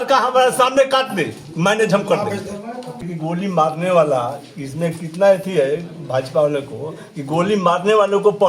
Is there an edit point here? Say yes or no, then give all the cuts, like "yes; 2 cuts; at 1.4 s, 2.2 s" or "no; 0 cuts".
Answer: yes; 1 cut; at 3.1 s